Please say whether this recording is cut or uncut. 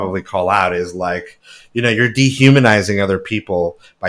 uncut